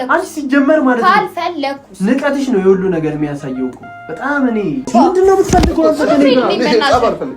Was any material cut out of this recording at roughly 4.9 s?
yes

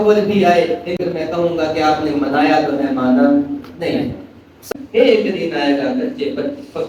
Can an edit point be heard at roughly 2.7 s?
no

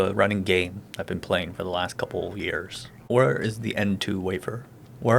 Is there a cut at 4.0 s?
no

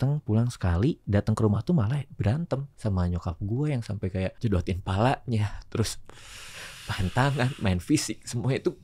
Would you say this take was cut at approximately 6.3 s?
no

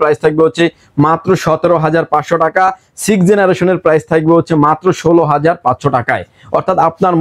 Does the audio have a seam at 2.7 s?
no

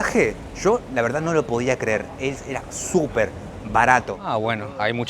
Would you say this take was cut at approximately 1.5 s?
no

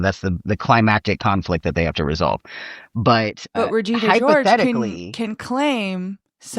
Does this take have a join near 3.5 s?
yes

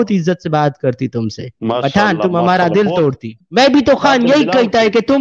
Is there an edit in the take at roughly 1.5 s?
no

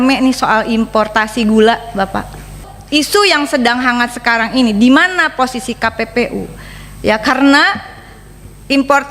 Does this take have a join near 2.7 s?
yes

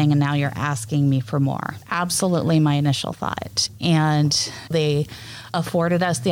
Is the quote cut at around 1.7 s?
yes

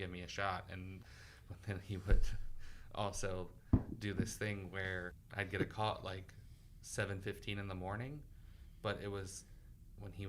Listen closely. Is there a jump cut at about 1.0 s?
yes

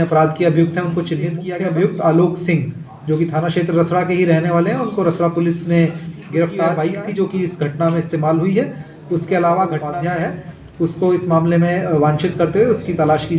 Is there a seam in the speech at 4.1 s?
no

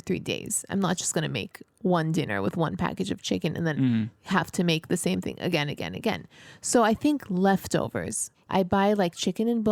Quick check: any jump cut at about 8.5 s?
yes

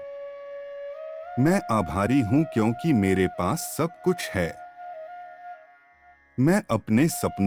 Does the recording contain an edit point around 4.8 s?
no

